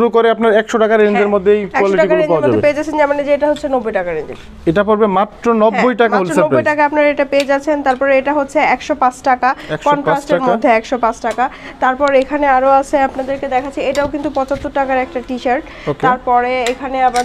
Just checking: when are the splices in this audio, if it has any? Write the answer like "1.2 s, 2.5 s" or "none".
none

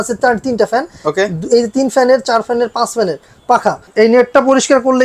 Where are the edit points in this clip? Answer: 3.8 s

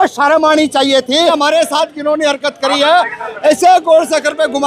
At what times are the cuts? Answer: 1.3 s

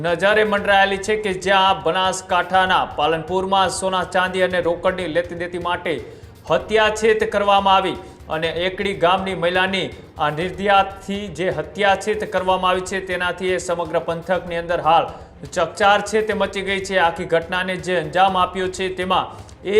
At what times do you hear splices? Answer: none

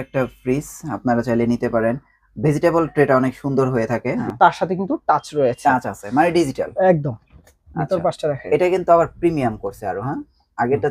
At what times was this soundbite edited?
4.3 s

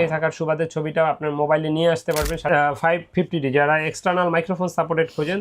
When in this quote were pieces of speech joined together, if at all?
2.4 s

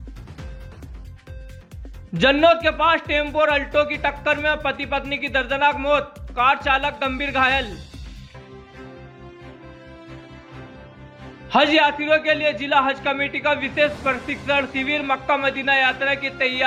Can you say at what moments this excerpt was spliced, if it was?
none

